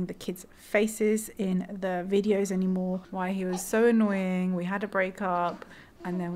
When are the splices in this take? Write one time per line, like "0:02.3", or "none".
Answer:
0:03.1